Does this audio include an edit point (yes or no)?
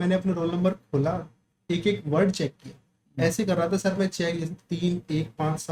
no